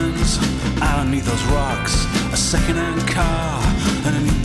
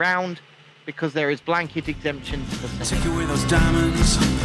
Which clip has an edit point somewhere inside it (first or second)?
second